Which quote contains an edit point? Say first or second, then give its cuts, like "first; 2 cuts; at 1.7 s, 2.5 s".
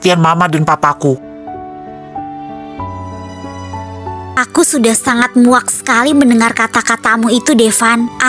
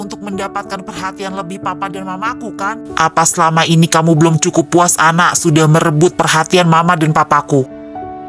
first; 1 cut; at 4.4 s